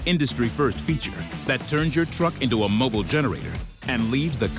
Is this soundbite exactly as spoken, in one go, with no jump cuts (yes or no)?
yes